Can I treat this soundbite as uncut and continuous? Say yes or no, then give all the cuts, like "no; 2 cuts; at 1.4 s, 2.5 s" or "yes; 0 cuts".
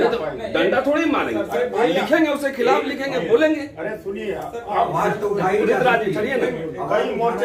yes; 0 cuts